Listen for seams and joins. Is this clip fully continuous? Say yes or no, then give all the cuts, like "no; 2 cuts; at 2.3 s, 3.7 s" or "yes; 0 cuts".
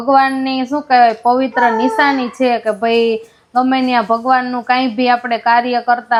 yes; 0 cuts